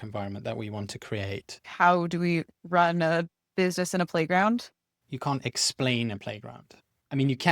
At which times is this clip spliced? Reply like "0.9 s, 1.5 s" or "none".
1.7 s, 4.9 s